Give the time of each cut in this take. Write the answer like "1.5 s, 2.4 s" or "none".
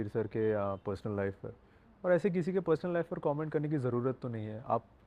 none